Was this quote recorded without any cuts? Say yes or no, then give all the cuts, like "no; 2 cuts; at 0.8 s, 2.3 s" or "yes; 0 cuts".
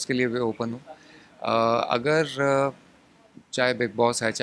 yes; 0 cuts